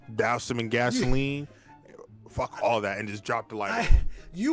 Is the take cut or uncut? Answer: uncut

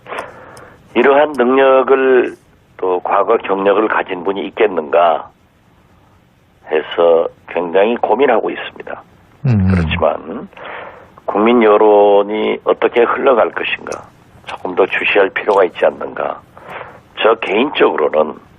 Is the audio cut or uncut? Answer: cut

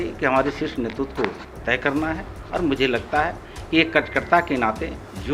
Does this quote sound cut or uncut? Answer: uncut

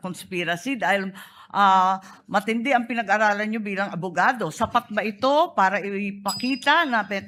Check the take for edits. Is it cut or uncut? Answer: uncut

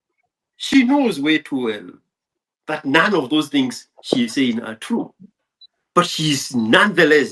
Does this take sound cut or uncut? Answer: uncut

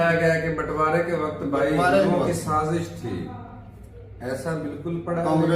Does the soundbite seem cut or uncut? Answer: uncut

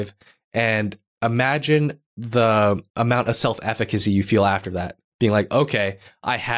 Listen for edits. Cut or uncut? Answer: cut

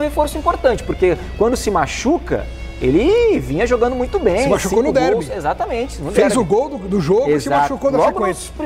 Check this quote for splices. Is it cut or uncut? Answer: uncut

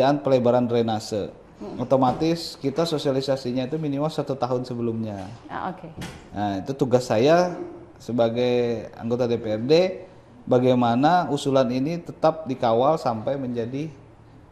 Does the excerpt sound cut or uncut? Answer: uncut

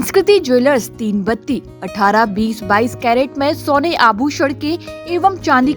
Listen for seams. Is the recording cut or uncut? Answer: uncut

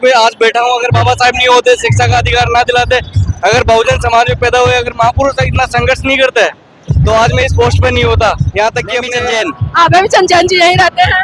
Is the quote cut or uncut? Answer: cut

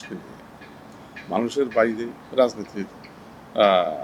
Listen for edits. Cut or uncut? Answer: cut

